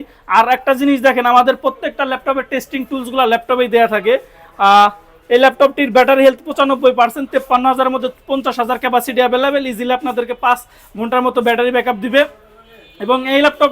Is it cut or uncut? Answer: uncut